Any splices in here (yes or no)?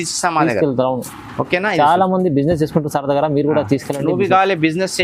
no